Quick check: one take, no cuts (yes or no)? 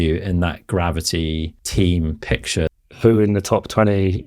no